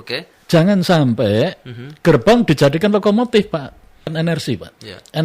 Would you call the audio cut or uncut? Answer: cut